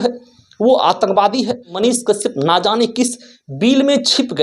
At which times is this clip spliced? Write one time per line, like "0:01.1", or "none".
0:01.7